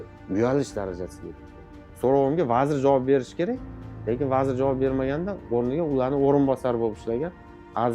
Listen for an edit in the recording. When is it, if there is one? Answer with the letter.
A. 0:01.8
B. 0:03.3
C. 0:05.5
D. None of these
A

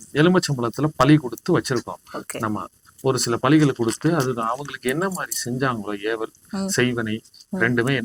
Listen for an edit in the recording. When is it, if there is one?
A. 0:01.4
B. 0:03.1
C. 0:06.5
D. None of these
D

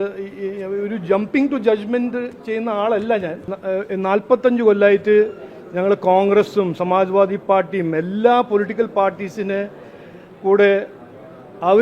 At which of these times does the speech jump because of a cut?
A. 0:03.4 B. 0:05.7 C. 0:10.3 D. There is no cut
A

